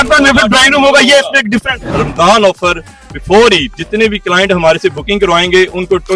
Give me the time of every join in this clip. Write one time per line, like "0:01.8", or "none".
0:02.0
0:03.8